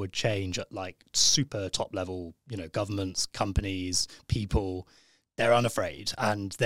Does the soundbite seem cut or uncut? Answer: uncut